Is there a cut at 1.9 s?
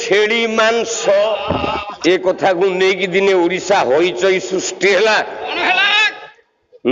yes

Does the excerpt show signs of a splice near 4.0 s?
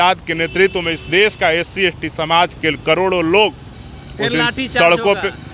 no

